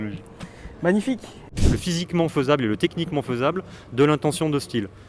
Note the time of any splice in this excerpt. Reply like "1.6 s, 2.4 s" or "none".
1.5 s